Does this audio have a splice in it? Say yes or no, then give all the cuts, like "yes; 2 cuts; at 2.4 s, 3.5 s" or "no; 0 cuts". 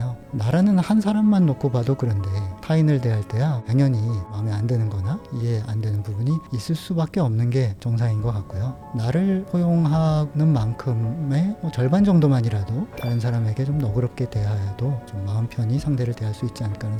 no; 0 cuts